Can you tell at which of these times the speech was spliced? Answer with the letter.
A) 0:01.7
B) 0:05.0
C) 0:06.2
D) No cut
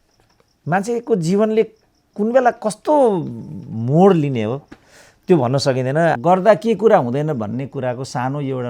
C